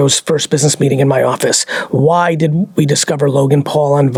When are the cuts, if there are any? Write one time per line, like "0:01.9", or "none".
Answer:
none